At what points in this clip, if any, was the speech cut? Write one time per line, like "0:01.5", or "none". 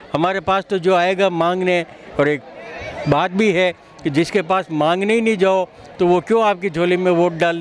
none